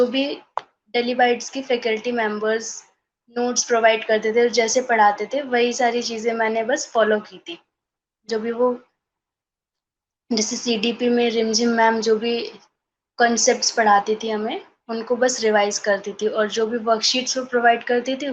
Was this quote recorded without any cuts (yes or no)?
yes